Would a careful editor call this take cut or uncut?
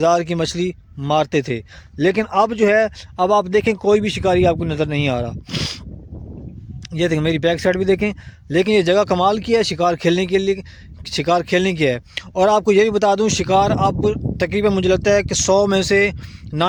uncut